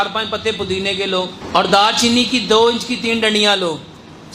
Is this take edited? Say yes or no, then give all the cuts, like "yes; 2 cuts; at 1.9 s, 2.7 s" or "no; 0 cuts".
yes; 1 cut; at 1.4 s